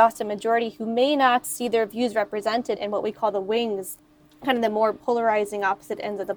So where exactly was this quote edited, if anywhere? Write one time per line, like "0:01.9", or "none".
0:02.8
0:03.9